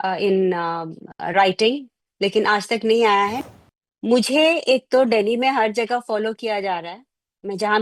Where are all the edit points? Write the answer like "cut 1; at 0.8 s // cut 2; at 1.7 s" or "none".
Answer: cut 1; at 3.4 s